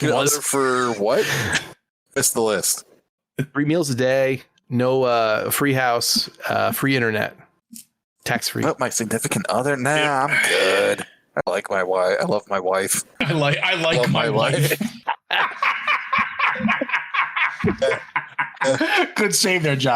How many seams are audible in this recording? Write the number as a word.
two